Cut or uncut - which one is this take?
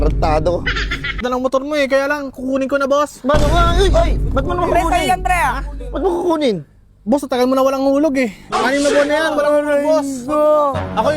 cut